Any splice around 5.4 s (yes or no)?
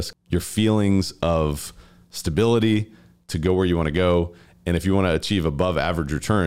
no